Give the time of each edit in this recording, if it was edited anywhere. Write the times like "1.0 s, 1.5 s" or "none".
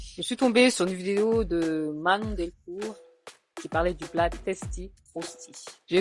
none

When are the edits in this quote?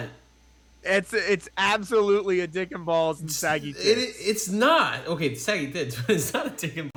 none

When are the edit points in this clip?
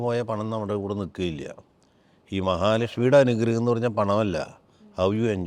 none

